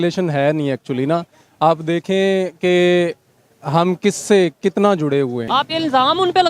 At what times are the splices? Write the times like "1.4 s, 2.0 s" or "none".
5.4 s